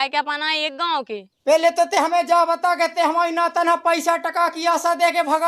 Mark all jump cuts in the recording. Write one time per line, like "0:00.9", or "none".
0:01.3